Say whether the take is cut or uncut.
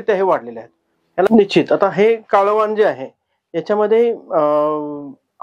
cut